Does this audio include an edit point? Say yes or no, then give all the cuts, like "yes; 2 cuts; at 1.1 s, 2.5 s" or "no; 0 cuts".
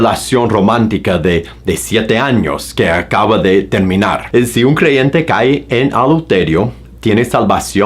yes; 1 cut; at 4.2 s